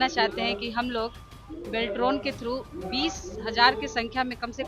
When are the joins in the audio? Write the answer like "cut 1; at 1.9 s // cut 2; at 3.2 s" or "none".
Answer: none